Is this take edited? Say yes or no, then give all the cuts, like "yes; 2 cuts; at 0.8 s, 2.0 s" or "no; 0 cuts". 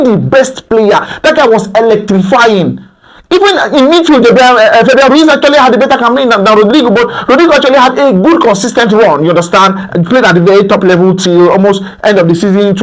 no; 0 cuts